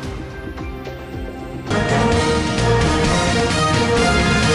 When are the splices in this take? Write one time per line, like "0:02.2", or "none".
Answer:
0:01.5